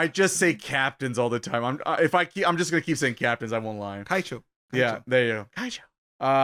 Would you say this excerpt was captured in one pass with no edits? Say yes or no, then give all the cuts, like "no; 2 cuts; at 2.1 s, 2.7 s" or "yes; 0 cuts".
yes; 0 cuts